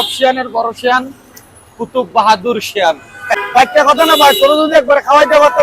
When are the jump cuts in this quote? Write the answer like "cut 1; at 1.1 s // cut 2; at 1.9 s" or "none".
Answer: cut 1; at 3.2 s